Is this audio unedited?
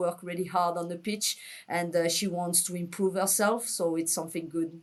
yes; 0 cuts

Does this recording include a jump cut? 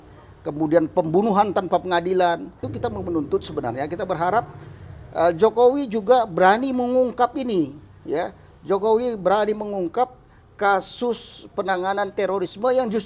yes; 1 cut; at 2.7 s

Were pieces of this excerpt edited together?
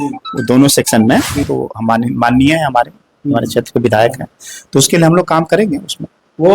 yes; 1 cut; at 1.5 s

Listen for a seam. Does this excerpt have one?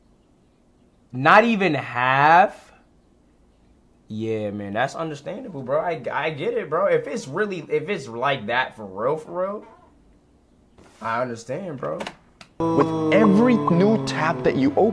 yes; 1 cut; at 12.6 s

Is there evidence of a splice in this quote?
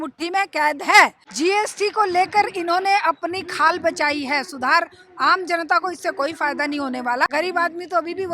yes; 2 cuts; at 1.2 s, 7.3 s

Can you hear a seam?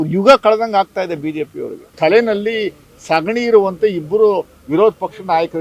yes; 1 cut; at 1.9 s

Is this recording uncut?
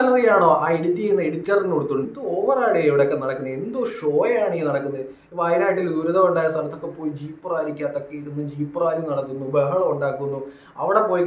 no; 1 cut; at 2.1 s

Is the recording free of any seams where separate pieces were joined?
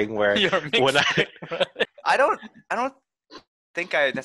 no; 1 cut; at 1.9 s

